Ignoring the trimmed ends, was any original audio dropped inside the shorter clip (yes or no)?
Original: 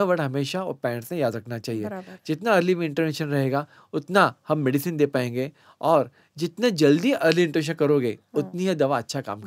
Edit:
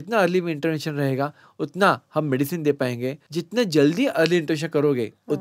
yes